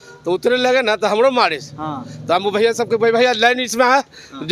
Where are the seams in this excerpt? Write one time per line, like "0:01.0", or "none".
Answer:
none